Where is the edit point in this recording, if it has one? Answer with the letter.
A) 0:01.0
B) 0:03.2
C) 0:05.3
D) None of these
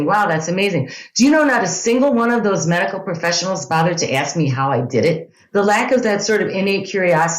C